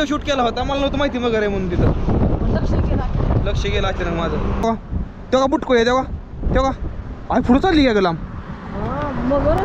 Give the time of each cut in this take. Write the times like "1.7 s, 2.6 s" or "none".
4.6 s